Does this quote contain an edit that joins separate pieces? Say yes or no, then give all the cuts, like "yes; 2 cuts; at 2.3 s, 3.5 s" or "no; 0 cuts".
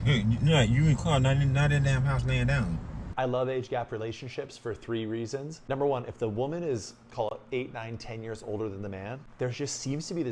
yes; 1 cut; at 3.1 s